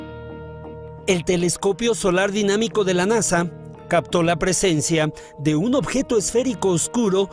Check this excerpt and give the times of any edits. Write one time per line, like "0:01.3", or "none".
0:04.5